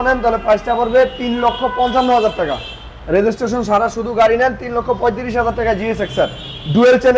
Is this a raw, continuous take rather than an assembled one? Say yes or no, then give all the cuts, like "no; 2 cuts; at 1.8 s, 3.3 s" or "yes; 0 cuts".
yes; 0 cuts